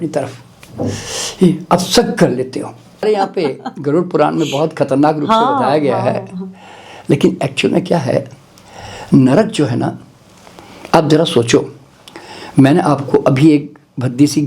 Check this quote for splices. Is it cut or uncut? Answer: cut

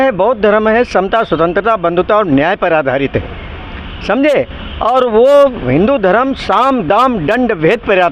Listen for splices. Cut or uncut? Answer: uncut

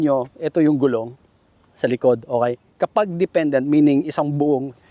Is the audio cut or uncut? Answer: uncut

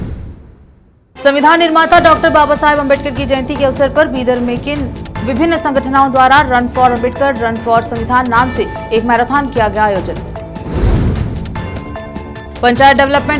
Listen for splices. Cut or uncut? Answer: cut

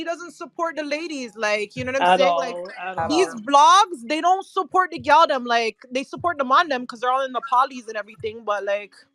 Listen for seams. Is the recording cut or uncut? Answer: uncut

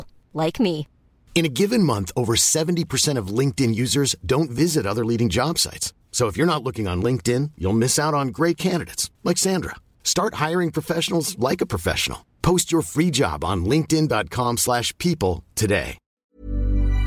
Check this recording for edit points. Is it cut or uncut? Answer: cut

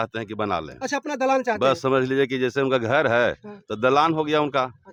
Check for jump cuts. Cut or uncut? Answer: uncut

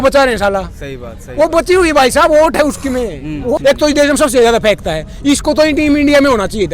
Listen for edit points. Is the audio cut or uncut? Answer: cut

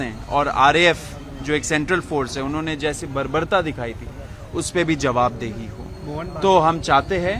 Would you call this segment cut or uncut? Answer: uncut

